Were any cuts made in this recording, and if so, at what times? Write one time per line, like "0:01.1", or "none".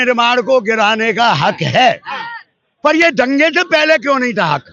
none